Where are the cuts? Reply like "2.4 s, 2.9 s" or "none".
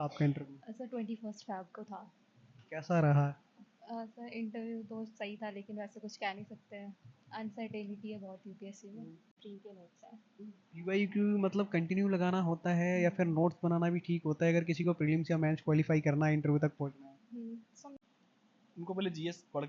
9.4 s, 18.0 s